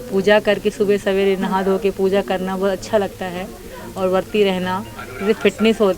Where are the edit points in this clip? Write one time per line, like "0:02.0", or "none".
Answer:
none